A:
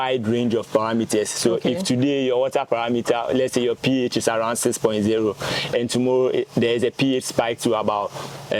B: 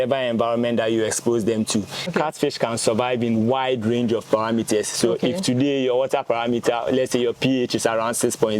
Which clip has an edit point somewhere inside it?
B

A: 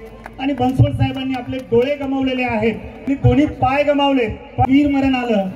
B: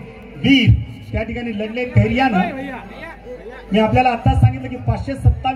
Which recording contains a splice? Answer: A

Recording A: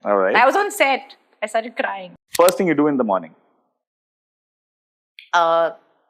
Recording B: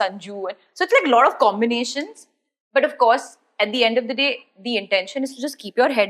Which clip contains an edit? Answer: A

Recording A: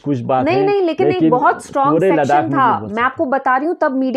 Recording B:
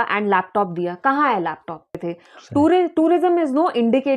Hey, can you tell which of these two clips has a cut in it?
B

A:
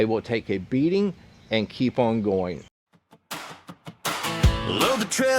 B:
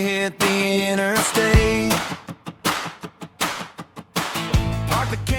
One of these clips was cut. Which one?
A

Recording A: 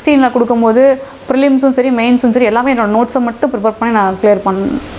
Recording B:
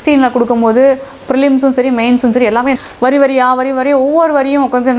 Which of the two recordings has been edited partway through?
B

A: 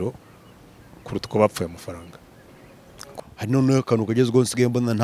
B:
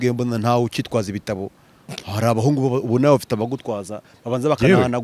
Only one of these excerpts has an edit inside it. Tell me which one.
A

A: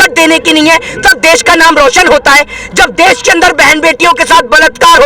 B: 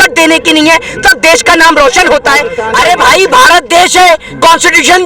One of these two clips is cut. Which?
B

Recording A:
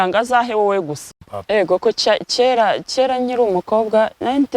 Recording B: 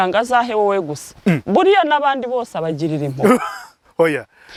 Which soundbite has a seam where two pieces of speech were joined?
A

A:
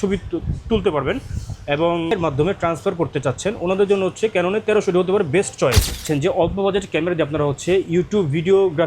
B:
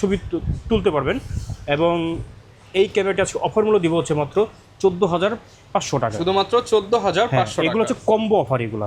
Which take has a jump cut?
A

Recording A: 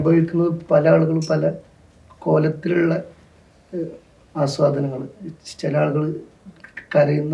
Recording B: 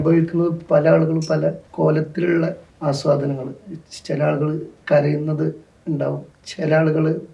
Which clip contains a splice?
B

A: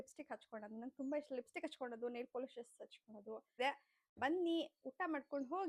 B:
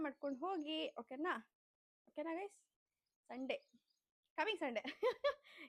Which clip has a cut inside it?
A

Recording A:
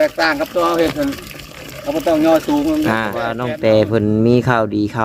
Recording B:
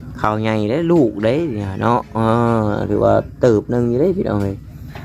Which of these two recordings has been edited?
A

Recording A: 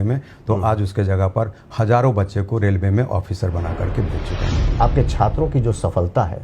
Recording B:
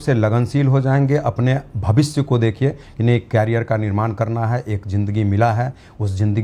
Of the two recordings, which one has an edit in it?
A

